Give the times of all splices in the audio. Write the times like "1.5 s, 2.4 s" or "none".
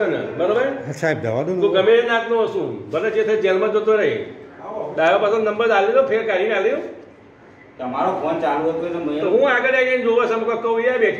none